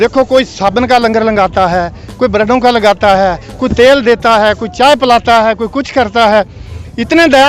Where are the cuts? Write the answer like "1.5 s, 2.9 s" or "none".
none

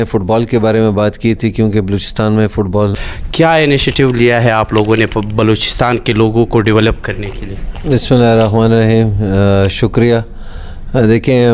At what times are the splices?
3.0 s

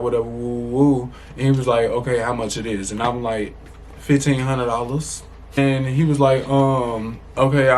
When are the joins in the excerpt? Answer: 5.6 s

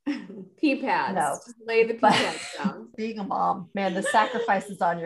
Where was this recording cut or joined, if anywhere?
2.9 s

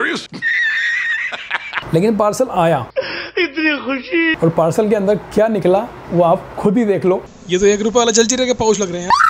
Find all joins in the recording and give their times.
1.7 s, 4.4 s, 7.3 s

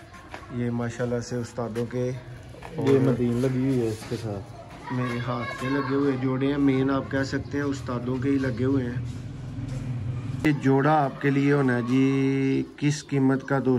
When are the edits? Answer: 10.5 s

